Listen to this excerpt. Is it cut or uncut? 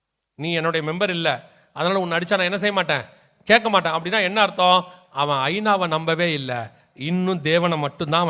cut